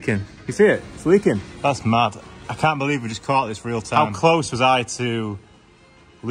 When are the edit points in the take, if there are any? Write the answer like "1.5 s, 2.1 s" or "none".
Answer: 1.5 s, 3.9 s

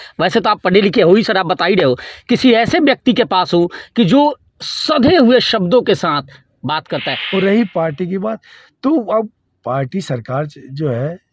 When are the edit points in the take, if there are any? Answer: 7.2 s

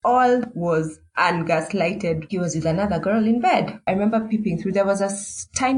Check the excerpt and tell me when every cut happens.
2.3 s, 3.8 s

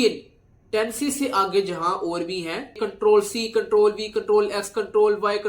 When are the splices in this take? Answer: 2.8 s

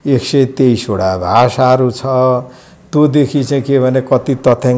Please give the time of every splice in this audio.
none

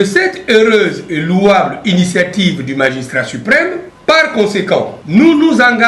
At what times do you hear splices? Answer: 3.9 s, 5.0 s

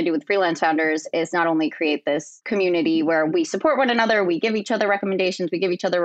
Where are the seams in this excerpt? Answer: 2.3 s

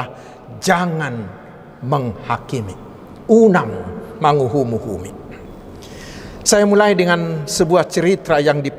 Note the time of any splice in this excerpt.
none

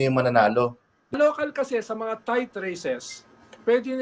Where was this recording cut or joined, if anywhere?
1.1 s

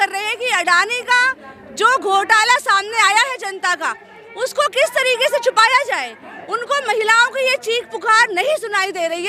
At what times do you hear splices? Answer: none

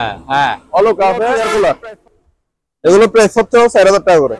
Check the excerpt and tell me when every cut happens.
1.3 s

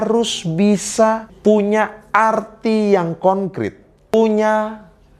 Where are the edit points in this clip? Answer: 1.3 s, 4.1 s

